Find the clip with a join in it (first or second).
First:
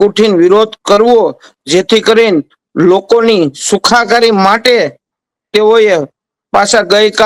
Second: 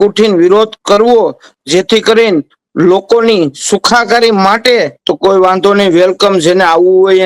second